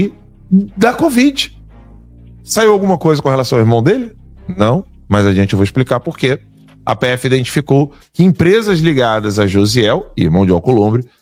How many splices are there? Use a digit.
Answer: 0